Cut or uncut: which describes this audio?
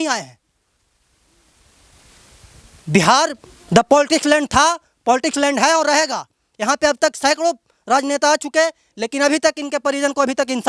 uncut